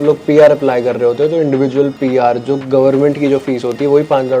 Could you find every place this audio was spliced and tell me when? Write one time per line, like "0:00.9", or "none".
none